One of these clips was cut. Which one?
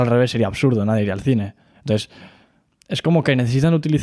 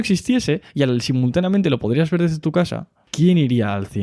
second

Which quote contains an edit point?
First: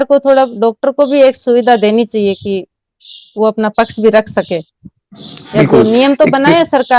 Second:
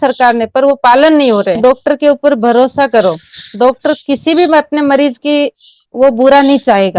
second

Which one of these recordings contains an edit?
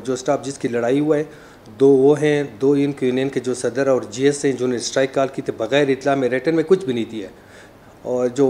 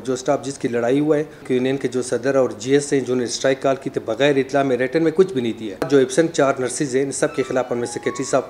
second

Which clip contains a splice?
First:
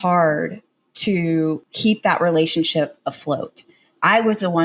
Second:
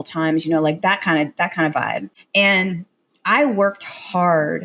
first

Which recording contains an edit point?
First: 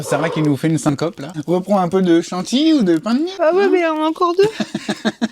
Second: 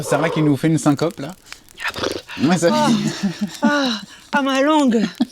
first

